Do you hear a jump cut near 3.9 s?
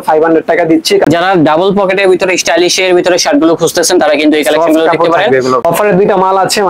no; 2 cuts; at 1.0 s, 5.7 s

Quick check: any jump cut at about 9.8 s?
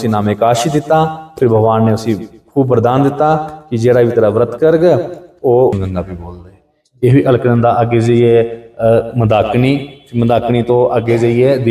no; 1 cut; at 5.8 s

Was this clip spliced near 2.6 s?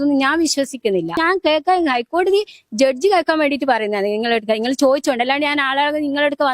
no; 1 cut; at 1.2 s

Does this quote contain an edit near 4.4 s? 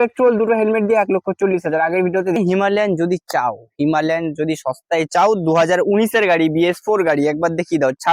no; 1 cut; at 2.4 s

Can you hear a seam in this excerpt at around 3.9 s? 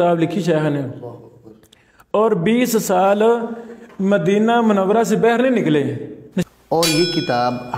no; 1 cut; at 6.3 s

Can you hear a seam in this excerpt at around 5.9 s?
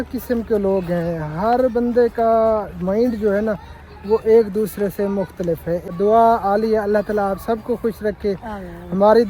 yes; 1 cut; at 5.9 s

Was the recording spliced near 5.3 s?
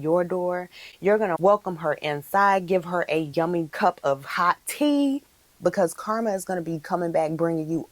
yes; 3 cuts; at 1.4 s, 3.5 s, 5.3 s

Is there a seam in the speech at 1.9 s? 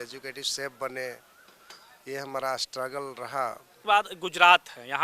no; 1 cut; at 3.7 s

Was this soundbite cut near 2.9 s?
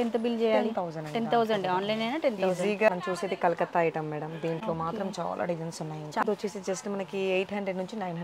yes; 2 cuts; at 2.9 s, 6.2 s

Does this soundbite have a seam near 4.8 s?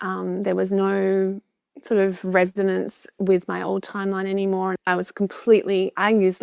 yes; 1 cut; at 4.8 s

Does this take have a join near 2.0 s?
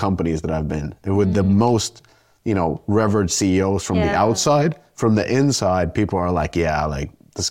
no; 0 cuts

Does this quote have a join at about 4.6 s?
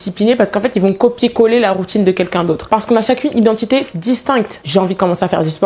yes; 2 cuts; at 2.6 s, 4.6 s

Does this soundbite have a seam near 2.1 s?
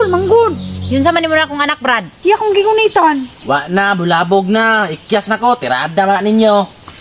yes; 1 cut; at 2.1 s

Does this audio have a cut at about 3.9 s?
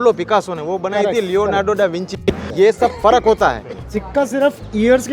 yes; 2 cuts; at 2.5 s, 3.9 s

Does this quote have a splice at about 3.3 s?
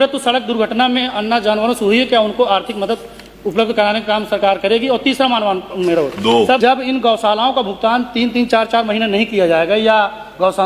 no; 1 cut; at 6.6 s

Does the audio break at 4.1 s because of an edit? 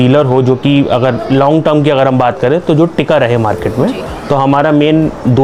no; 0 cuts

